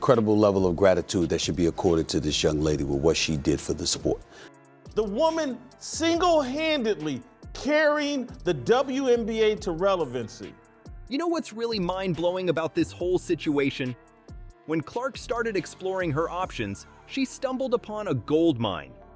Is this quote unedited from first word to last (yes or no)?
yes